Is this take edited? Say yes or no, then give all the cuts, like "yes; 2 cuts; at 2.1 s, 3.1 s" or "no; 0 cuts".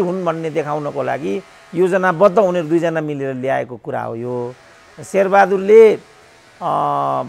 no; 0 cuts